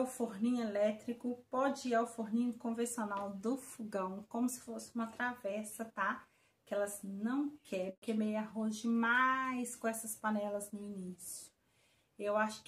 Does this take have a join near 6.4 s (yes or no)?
no